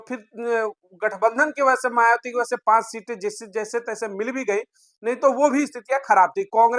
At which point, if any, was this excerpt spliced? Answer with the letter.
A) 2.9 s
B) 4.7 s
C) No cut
C